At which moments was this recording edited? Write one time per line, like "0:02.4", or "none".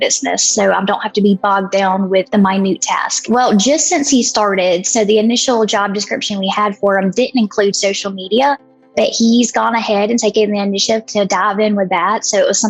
0:02.3
0:03.2